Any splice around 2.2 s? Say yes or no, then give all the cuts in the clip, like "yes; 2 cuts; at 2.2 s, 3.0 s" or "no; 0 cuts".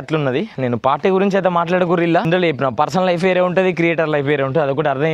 yes; 1 cut; at 2.2 s